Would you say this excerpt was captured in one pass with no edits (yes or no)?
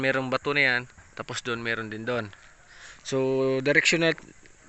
yes